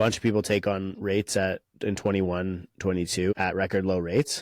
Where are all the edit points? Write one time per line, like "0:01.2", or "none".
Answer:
0:03.3